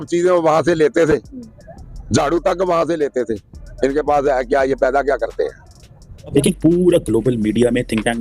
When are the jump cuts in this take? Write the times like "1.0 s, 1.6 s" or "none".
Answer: 6.3 s